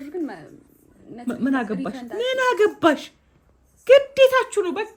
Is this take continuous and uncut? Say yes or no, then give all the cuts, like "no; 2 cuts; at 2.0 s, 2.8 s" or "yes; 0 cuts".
yes; 0 cuts